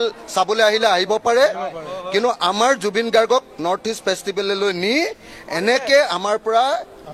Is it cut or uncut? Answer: uncut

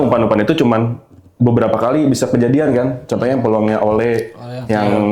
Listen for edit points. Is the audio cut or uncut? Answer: uncut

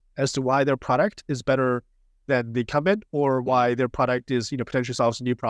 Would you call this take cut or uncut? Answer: uncut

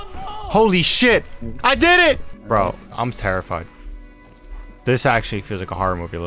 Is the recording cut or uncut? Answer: cut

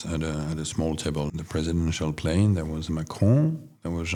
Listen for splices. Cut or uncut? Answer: uncut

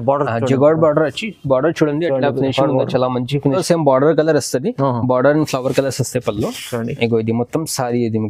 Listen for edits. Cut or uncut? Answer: cut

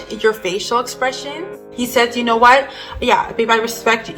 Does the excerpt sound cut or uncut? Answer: cut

